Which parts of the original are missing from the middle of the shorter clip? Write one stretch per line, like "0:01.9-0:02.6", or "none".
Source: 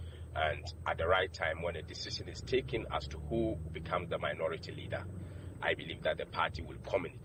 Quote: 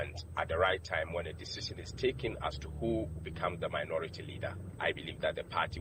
0:05.1-0:05.5